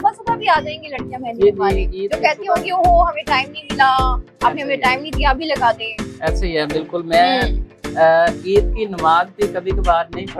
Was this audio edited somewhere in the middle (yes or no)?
no